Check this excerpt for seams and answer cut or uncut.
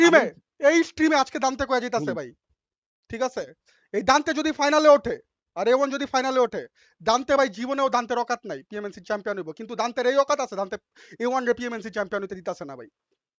uncut